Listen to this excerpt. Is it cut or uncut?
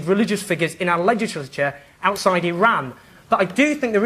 cut